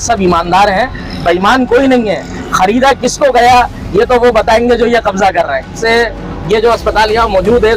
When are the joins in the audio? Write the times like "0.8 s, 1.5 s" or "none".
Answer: 5.8 s